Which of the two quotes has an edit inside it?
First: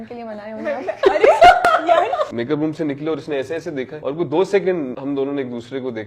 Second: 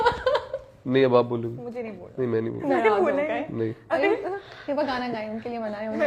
first; 3 cuts; at 2.3 s, 3.9 s, 5.0 s

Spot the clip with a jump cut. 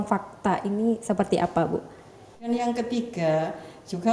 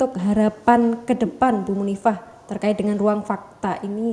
first; 1 cut; at 2.5 s

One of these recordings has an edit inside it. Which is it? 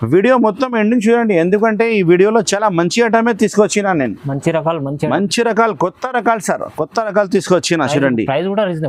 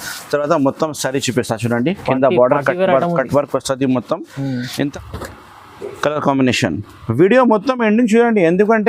second; 1 cut; at 4.9 s

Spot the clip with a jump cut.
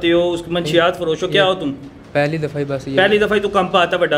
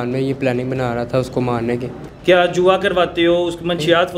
second; 1 cut; at 2.0 s

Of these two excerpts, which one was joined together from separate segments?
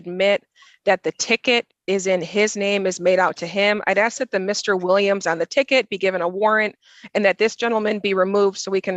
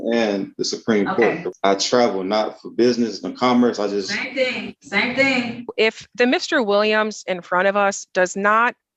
second; 2 cuts; at 1.5 s, 5.7 s

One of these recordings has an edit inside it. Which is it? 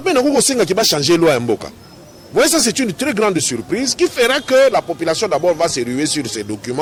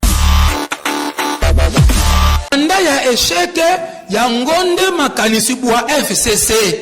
second; 1 cut; at 2.5 s

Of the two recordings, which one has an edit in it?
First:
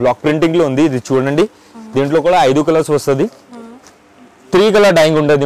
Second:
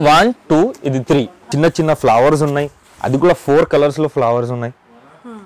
second; 1 cut; at 1.4 s

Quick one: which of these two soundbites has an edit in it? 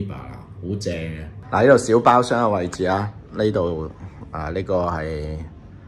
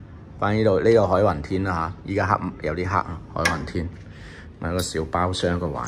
first; 1 cut; at 1.3 s

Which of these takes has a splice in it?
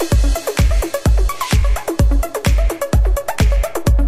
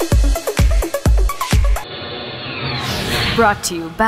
first; 1 cut; at 1.7 s

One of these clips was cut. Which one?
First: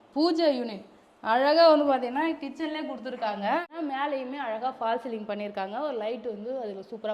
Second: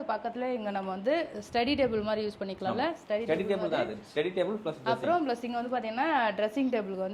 first; 1 cut; at 3.7 s

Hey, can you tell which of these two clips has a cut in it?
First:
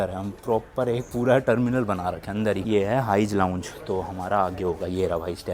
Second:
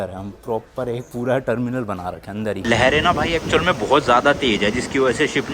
second; 1 cut; at 2.6 s

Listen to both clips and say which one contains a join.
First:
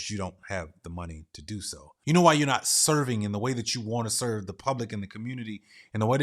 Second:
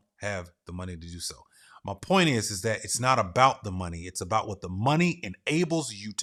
first; 1 cut; at 1.8 s

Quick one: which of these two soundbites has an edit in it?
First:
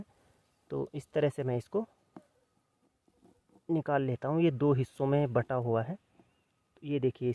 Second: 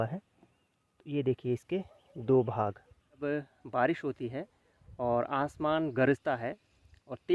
second; 1 cut; at 3.2 s

